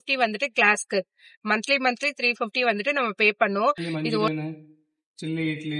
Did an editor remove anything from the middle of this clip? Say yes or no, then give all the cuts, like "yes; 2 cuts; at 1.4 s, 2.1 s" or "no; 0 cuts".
yes; 1 cut; at 4.3 s